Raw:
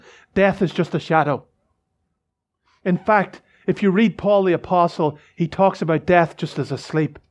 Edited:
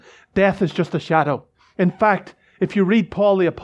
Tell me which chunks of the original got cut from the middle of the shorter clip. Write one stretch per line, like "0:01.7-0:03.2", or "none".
0:01.6-0:02.6

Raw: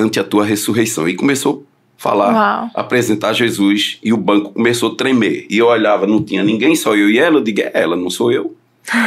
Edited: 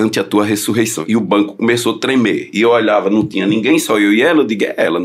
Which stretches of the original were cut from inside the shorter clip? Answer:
0:01.0-0:03.9

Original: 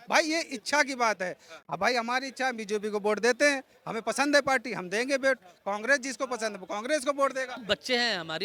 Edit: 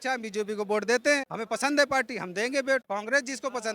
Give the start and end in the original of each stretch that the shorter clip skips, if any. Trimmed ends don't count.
0:03.7-0:03.9
0:05.4-0:05.6

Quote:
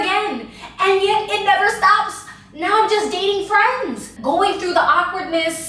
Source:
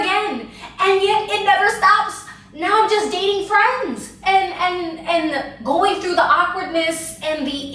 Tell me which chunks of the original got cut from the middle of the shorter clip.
0:04.1-0:05.5

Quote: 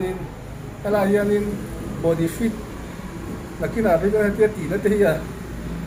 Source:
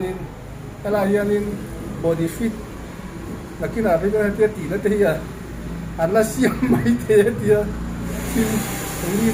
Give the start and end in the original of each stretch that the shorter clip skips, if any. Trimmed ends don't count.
none

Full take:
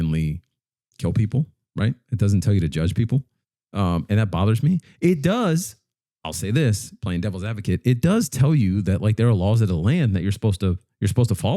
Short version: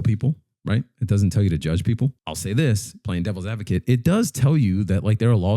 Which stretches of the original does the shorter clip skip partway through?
0:03.4-0:06.3

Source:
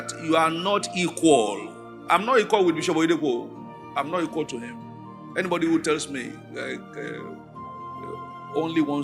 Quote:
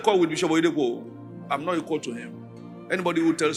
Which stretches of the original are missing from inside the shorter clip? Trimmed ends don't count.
none

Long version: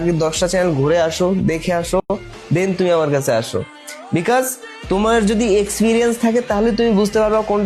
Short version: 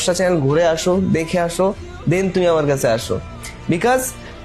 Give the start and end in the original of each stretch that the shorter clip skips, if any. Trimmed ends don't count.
0:02.0-0:02.1

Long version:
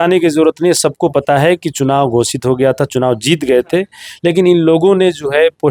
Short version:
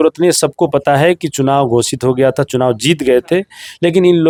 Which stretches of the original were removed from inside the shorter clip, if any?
none

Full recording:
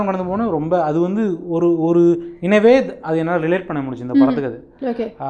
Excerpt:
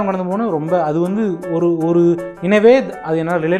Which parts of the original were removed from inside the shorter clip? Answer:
none

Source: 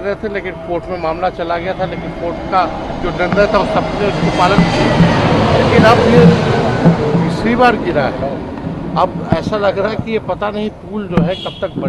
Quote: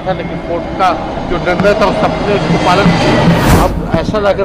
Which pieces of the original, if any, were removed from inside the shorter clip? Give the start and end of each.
0:05.3-0:08.9

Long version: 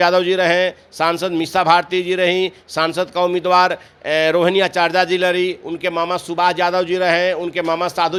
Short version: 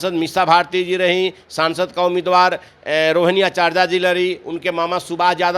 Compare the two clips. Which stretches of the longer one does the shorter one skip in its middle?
none

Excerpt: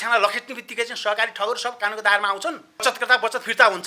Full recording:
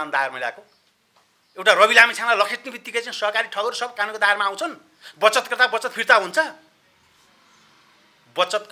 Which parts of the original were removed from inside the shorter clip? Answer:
0:05.0-0:05.3

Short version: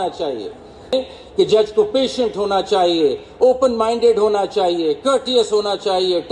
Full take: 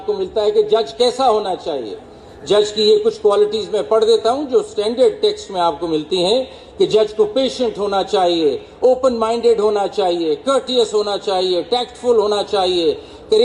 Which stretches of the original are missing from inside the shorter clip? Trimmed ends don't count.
0:02.4-0:06.3

